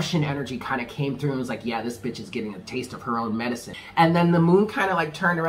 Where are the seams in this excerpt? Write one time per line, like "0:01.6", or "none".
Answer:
0:03.7